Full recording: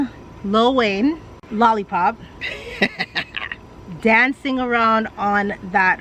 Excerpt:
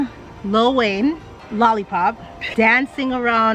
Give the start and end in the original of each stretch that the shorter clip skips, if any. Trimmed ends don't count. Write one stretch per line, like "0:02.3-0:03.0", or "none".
0:02.3-0:03.8